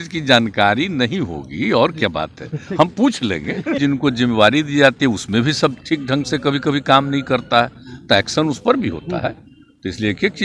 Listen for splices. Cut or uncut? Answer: cut